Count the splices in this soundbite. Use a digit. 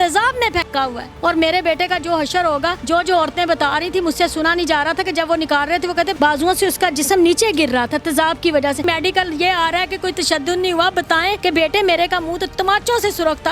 5